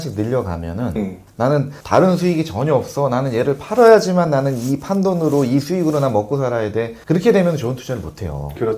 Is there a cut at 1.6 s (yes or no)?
yes